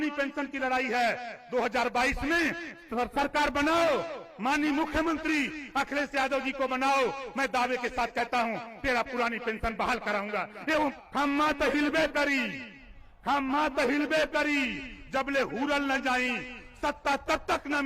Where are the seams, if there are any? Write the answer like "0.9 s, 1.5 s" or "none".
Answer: 11.0 s

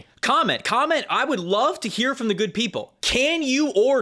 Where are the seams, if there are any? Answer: 2.9 s

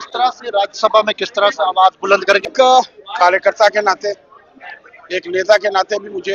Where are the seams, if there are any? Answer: 2.5 s

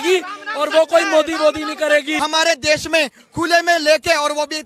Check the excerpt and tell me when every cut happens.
2.2 s

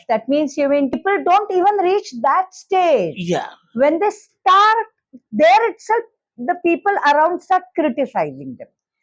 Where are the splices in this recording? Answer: 0.9 s

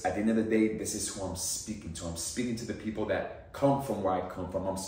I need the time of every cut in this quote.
none

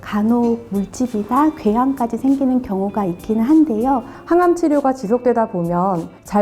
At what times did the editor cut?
4.1 s

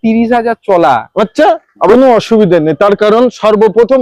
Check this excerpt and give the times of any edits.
1.9 s

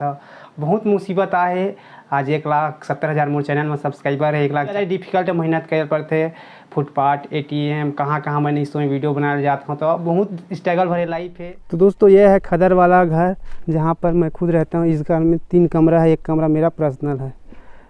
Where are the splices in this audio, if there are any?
4.7 s, 11.2 s

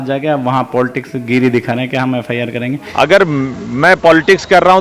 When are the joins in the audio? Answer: 2.8 s

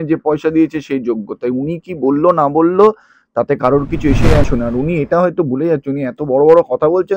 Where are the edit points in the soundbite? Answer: 4.4 s

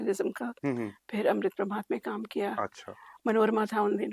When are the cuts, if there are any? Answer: none

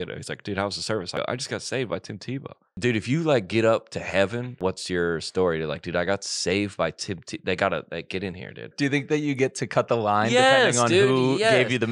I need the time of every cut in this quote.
1.1 s, 2.7 s, 4.6 s, 8.7 s

